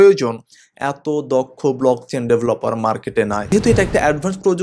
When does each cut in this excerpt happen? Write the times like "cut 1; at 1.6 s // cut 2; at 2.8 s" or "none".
cut 1; at 3.5 s